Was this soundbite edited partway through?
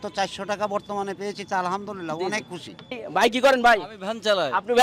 yes; 1 cut; at 3.0 s

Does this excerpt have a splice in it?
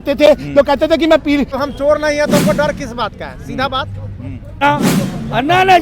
yes; 2 cuts; at 1.6 s, 4.6 s

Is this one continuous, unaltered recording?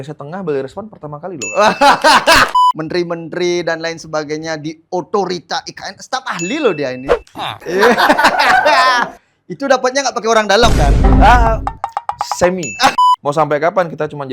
no; 2 cuts; at 2.5 s, 12.9 s

